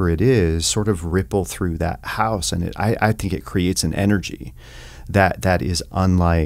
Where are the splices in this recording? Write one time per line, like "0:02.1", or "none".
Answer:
none